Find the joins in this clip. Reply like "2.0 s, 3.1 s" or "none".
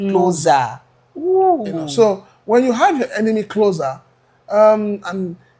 none